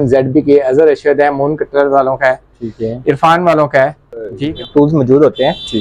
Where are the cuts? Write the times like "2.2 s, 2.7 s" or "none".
4.4 s